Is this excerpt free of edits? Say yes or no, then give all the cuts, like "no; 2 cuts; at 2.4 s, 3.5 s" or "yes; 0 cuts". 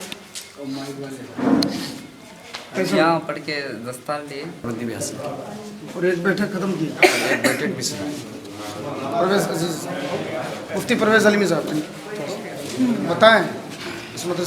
no; 1 cut; at 4.7 s